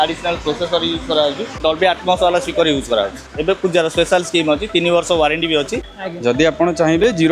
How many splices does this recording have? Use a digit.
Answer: 3